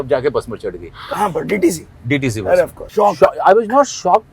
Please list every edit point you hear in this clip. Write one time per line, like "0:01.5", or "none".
0:02.8